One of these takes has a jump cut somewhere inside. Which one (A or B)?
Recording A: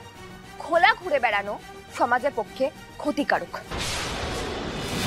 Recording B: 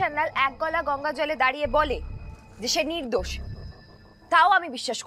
A